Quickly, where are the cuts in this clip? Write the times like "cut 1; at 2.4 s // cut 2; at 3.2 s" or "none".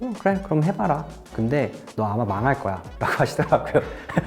none